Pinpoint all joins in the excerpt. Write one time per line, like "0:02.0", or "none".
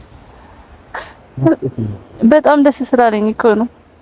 none